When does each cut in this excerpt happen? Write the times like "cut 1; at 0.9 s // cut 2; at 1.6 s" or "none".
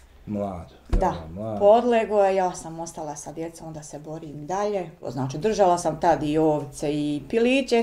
cut 1; at 5.0 s